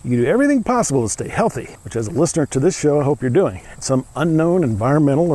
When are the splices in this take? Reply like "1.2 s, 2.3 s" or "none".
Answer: 1.7 s, 3.7 s